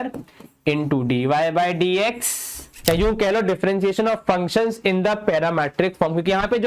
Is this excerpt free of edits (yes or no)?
no